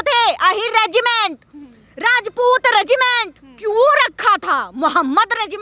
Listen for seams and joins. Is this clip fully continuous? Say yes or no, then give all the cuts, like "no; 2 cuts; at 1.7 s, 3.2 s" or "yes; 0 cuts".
yes; 0 cuts